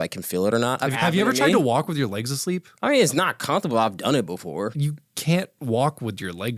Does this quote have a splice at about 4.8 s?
yes; 2 cuts; at 0.9 s, 4.8 s

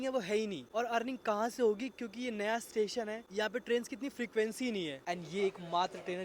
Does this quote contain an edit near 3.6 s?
no; 1 cut; at 5.0 s

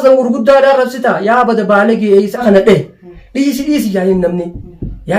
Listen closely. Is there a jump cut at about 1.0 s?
no; 1 cut; at 2.4 s

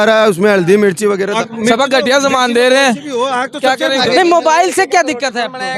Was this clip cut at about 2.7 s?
no; 2 cuts; at 1.3 s, 4.0 s

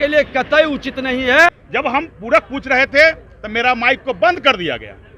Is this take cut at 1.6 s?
yes; 1 cut; at 1.6 s

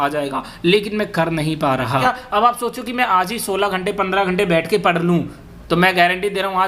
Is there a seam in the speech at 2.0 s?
yes; 1 cut; at 2.0 s

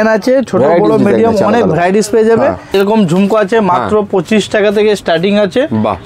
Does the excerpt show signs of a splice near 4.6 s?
no; 1 cut; at 2.7 s

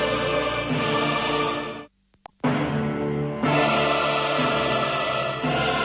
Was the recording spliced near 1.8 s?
yes; 1 cut; at 1.8 s

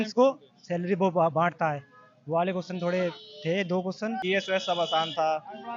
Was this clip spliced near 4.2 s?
yes; 1 cut; at 4.2 s

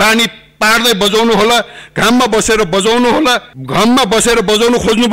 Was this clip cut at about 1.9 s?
no; 1 cut; at 3.5 s

